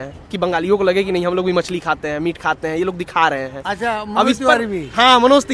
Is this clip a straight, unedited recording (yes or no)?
yes